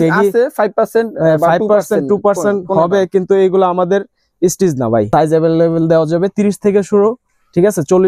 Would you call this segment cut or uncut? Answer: cut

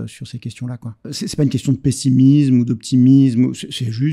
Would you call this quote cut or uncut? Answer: cut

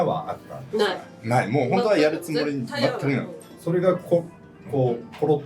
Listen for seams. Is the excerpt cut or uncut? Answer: uncut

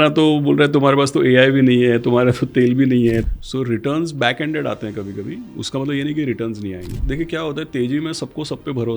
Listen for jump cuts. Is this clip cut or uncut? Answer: cut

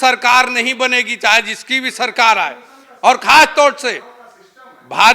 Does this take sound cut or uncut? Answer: uncut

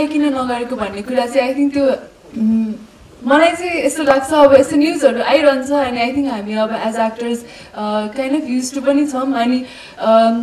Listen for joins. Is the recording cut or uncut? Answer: uncut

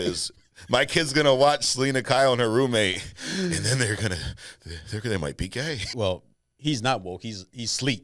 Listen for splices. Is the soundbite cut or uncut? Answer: cut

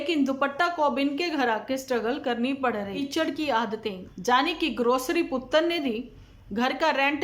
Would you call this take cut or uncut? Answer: cut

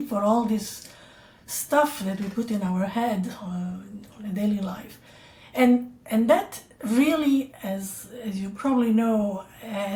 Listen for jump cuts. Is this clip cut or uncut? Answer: uncut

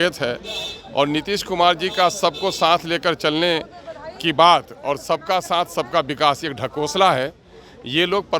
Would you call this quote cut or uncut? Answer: uncut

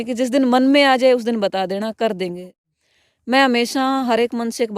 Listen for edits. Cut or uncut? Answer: cut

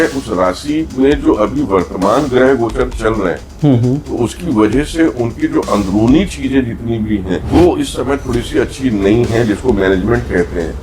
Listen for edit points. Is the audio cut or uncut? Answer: cut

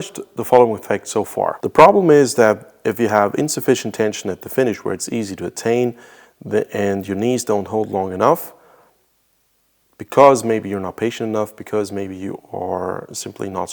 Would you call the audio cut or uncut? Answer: cut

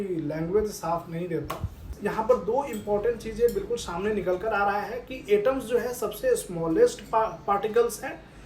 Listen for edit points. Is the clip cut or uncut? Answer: cut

